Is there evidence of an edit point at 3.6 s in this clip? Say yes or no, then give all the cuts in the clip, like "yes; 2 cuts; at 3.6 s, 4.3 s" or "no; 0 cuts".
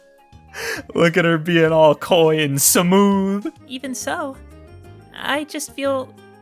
yes; 1 cut; at 3.6 s